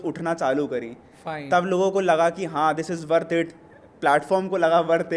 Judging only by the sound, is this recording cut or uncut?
uncut